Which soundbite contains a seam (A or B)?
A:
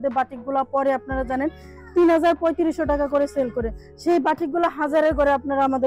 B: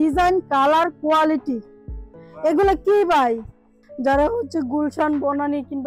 B